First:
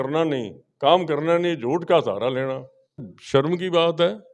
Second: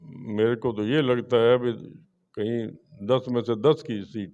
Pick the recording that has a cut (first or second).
first